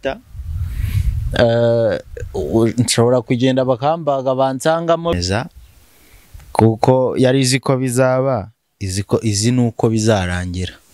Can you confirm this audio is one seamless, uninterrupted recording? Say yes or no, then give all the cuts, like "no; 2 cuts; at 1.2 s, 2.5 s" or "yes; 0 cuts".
no; 1 cut; at 5.2 s